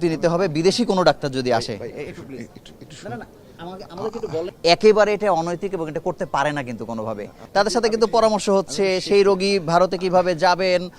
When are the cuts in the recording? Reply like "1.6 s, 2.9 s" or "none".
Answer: 4.5 s, 7.4 s